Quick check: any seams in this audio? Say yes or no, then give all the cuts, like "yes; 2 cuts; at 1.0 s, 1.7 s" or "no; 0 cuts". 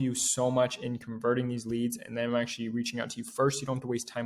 no; 0 cuts